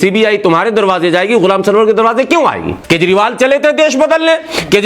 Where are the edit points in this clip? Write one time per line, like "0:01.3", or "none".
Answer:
0:02.7